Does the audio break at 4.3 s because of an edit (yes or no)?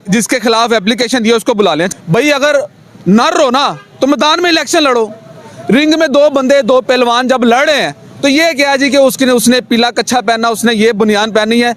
no